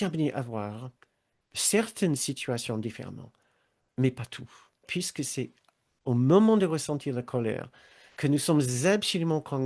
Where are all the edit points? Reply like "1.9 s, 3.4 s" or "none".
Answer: 4.9 s